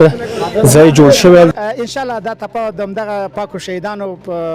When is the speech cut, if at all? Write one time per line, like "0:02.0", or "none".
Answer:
0:01.5

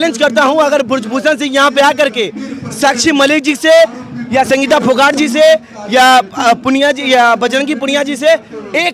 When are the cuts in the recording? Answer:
none

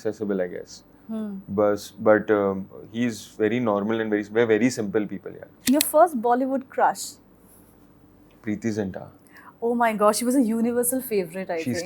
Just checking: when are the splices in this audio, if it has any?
0:05.5

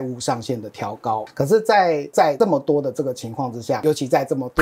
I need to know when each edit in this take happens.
0:01.2
0:02.3
0:03.8

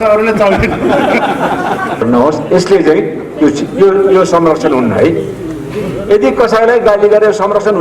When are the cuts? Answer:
0:02.0

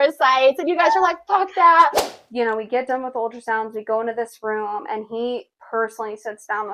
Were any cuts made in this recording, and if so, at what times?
0:02.0

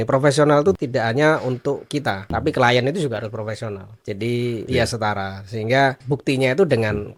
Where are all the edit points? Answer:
0:00.8
0:02.4
0:03.9
0:04.6
0:06.0

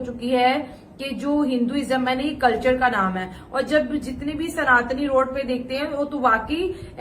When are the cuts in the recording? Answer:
none

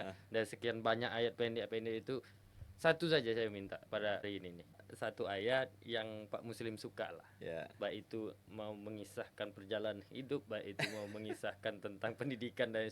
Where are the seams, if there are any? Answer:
0:04.2

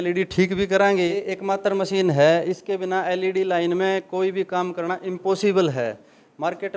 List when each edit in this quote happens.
0:01.2

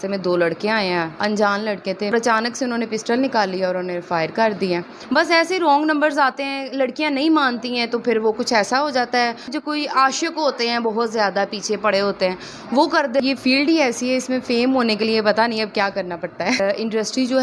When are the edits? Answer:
0:01.1
0:02.1
0:04.9
0:09.5
0:13.2
0:16.6

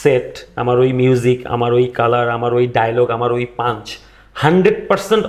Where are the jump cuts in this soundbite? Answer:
none

